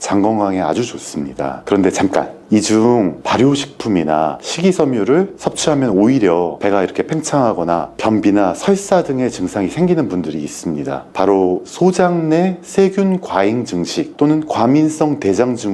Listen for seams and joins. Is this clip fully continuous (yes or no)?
no